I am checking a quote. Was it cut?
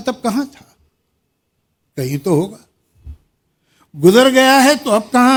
no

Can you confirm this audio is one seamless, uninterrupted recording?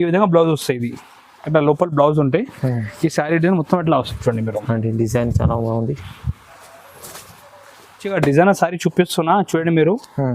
no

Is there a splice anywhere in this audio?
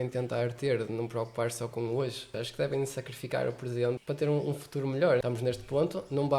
yes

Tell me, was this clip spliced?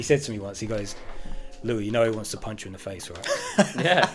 no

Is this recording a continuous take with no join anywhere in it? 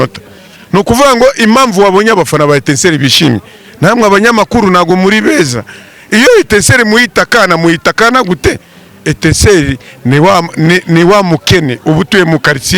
yes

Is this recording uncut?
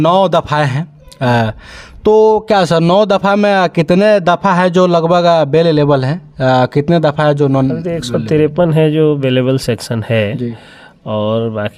yes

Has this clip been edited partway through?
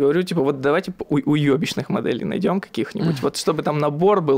no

